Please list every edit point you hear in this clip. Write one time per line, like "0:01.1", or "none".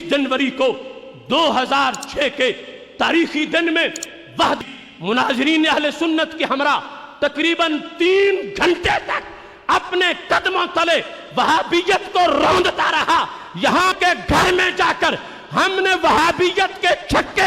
0:04.6
0:14.0